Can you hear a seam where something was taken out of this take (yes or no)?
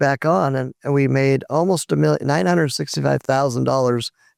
no